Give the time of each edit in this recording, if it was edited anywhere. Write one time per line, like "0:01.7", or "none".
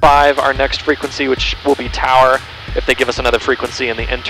none